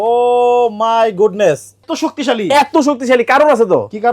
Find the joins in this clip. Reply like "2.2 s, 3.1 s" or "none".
1.9 s